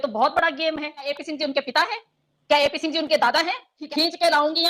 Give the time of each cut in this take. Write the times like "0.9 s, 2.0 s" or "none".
1.1 s, 3.8 s